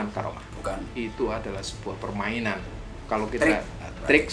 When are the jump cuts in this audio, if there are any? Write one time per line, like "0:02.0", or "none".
none